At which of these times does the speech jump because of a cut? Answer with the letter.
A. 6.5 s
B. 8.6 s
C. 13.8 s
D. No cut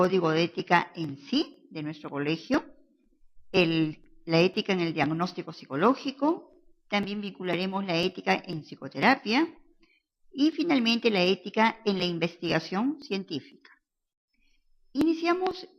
C